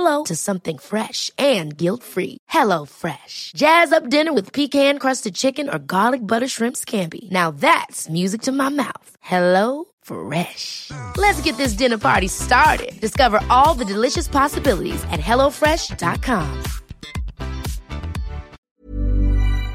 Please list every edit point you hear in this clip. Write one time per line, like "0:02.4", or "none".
0:18.7